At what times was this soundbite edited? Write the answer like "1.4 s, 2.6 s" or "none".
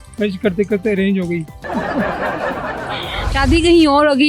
1.6 s, 3.3 s